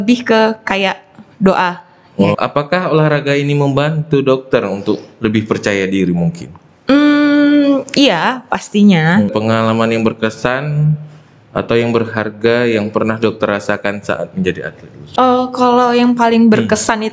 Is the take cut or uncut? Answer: cut